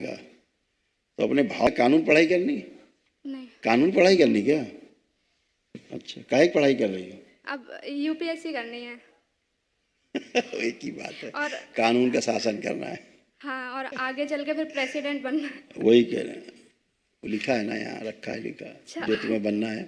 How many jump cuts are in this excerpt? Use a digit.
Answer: 1